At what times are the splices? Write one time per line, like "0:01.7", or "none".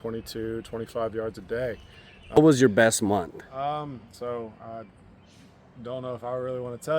0:02.4